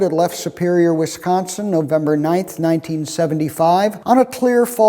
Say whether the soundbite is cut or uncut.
cut